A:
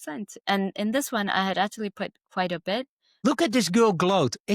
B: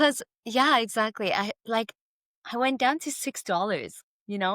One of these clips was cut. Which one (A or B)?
A